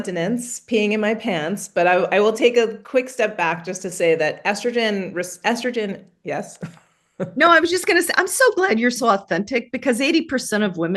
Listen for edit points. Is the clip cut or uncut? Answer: uncut